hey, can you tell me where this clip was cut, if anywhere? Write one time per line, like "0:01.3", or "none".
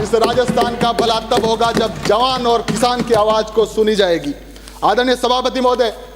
none